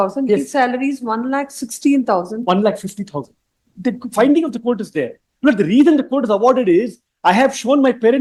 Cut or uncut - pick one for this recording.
uncut